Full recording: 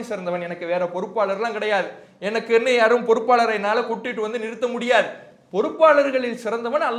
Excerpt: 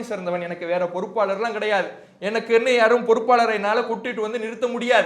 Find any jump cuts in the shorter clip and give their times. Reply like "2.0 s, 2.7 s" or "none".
none